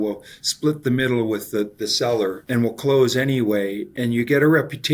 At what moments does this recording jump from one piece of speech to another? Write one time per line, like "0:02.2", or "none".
0:02.4
0:03.8